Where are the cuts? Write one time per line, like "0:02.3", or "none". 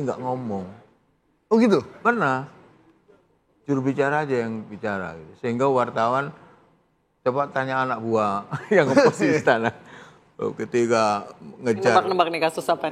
none